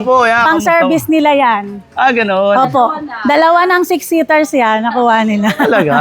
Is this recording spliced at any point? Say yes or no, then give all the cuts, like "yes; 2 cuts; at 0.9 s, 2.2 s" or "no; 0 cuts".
no; 0 cuts